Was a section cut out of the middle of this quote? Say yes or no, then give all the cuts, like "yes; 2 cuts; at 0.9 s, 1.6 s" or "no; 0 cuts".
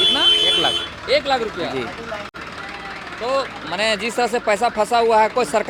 no; 0 cuts